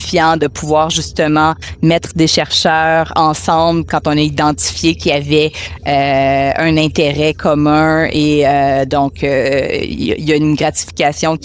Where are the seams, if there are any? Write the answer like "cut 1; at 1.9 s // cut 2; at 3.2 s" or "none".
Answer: none